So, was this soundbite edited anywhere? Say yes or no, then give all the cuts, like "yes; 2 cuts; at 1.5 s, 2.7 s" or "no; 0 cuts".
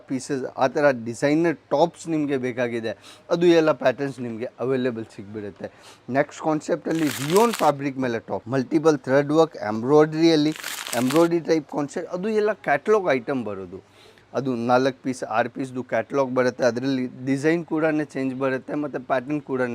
yes; 1 cut; at 8.4 s